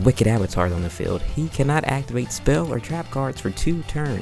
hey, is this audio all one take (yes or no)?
yes